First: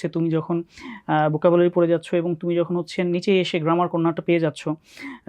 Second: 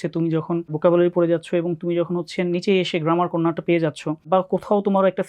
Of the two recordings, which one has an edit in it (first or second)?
second